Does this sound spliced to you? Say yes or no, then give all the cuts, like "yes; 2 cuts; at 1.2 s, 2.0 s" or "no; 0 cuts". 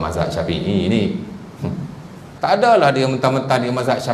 yes; 1 cut; at 2.3 s